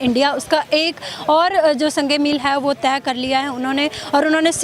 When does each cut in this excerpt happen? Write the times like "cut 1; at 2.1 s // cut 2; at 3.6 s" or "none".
none